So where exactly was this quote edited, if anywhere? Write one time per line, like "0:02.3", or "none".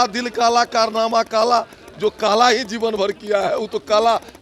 none